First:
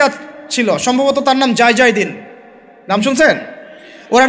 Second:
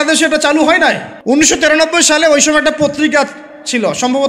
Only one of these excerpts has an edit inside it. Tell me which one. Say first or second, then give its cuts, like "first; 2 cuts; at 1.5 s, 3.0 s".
second; 1 cut; at 1.1 s